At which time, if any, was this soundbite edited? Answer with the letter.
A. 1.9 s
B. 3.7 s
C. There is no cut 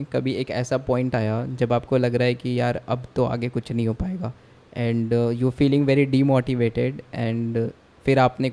C